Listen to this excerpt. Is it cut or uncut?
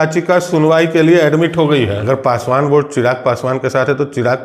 cut